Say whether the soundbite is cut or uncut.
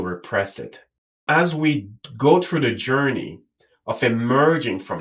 cut